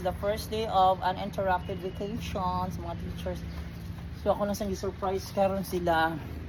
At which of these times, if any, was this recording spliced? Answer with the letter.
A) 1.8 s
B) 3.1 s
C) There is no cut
C